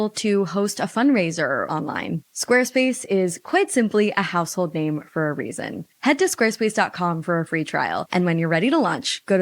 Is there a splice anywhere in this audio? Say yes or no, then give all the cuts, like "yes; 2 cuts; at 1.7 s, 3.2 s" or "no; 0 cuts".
yes; 1 cut; at 1.7 s